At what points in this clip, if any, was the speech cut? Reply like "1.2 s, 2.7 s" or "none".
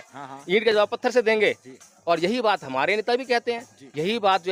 none